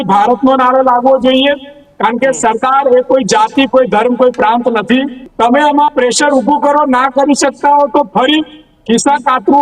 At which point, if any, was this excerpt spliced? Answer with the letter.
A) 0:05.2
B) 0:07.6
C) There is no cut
A